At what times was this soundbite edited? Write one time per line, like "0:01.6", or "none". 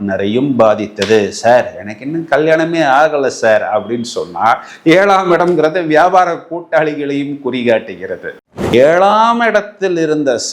0:08.4